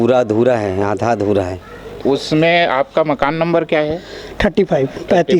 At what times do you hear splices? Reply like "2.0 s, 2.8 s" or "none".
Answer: 2.0 s